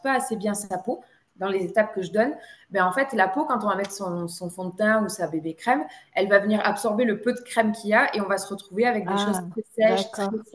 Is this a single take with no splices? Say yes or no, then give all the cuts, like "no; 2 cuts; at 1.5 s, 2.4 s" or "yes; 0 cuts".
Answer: yes; 0 cuts